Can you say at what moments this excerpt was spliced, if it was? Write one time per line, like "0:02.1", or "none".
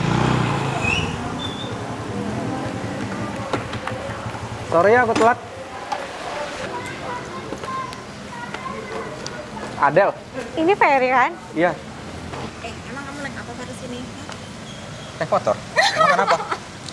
0:12.5